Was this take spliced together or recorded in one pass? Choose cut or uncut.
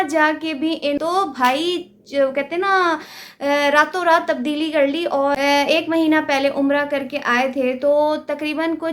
cut